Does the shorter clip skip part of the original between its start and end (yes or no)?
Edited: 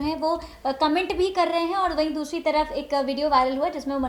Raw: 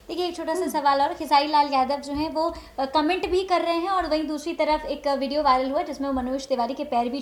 no